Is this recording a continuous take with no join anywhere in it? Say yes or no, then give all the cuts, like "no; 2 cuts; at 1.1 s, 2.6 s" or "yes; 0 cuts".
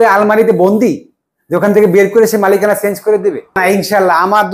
no; 1 cut; at 3.6 s